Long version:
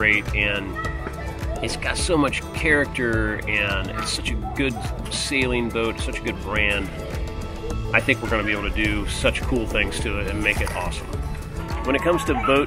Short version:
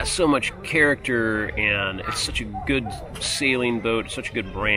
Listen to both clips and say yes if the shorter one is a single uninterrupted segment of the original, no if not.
yes